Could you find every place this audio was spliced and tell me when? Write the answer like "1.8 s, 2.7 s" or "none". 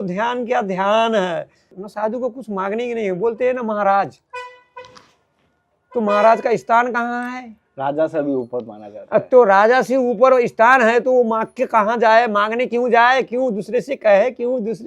1.7 s